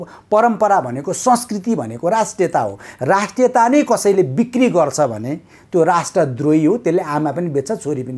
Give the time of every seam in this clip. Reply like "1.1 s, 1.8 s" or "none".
none